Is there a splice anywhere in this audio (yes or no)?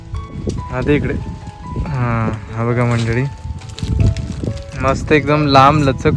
no